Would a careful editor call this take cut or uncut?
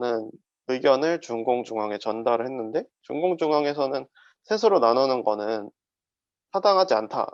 uncut